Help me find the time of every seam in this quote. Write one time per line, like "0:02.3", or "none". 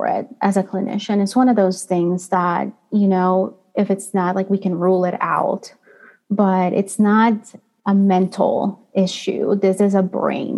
none